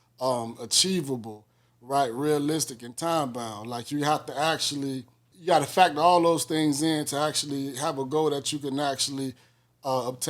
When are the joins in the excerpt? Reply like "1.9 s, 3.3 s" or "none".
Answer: 5.3 s